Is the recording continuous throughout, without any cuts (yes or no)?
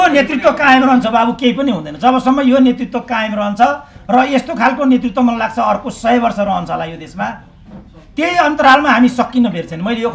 yes